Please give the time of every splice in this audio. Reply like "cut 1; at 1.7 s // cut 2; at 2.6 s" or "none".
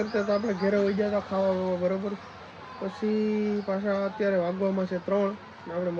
none